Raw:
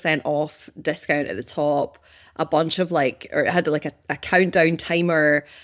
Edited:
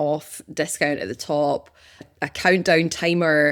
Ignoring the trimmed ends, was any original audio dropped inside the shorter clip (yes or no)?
yes